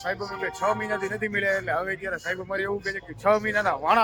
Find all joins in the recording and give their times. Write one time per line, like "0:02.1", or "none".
none